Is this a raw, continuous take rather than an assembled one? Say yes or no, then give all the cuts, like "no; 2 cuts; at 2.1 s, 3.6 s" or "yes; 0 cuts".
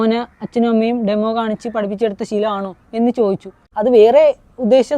no; 1 cut; at 3.7 s